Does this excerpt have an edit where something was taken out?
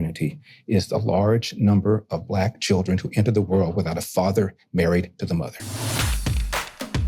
yes; 1 cut; at 5.6 s

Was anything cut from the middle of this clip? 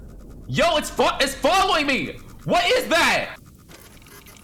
no; 0 cuts

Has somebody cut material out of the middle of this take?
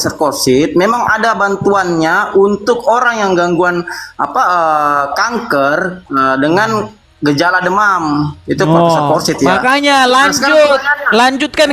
no; 0 cuts

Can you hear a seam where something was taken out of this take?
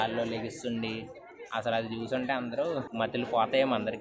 yes; 1 cut; at 2.9 s

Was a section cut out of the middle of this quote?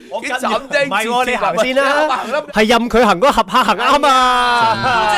yes; 1 cut; at 2.4 s

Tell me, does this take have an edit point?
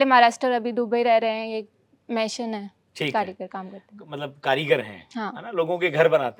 no; 0 cuts

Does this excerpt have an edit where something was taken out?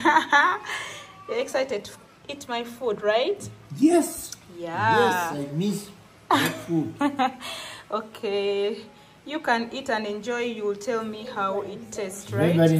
no; 0 cuts

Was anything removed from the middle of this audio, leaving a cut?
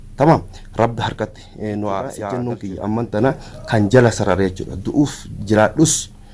yes; 1 cut; at 2.3 s

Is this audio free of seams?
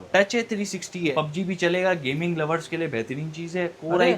no; 1 cut; at 1.1 s

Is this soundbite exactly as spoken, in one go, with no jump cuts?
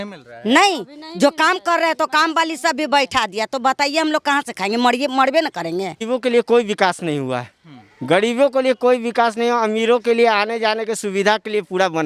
no; 1 cut; at 6.0 s

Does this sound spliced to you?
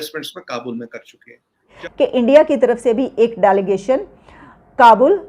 yes; 1 cut; at 1.7 s

